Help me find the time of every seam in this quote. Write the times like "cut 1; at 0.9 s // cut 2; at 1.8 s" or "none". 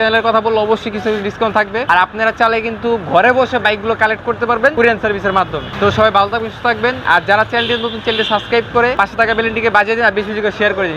cut 1; at 1.9 s // cut 2; at 4.7 s // cut 3; at 5.7 s // cut 4; at 7.0 s // cut 5; at 8.9 s